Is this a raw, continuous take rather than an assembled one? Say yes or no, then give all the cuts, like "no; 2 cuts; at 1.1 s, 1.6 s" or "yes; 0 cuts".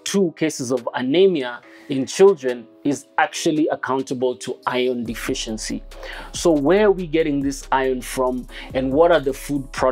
yes; 0 cuts